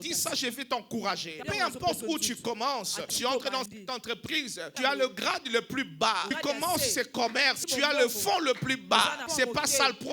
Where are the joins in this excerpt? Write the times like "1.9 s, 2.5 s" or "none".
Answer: 1.4 s, 3.1 s, 4.7 s, 6.3 s, 7.6 s, 9.2 s